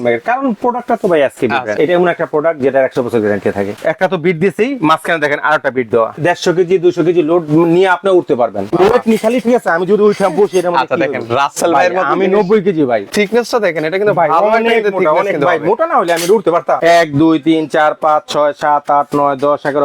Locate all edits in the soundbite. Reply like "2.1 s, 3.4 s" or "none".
1.8 s, 3.7 s, 6.2 s, 8.7 s, 13.1 s, 16.8 s